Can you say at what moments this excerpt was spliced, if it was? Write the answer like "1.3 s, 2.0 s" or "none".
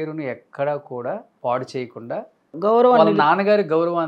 1.3 s, 2.5 s

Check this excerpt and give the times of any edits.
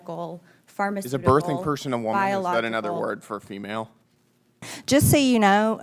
4.7 s

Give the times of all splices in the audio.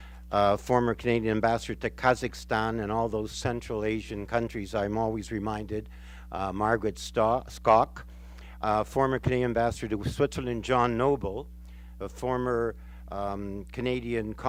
none

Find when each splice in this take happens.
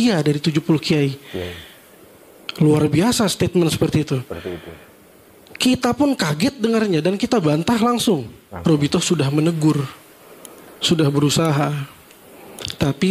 8.5 s

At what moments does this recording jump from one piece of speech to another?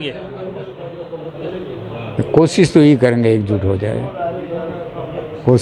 none

